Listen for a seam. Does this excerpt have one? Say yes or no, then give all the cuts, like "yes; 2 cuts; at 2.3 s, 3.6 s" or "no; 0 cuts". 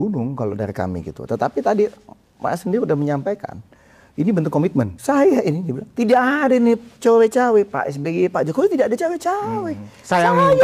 yes; 1 cut; at 4.9 s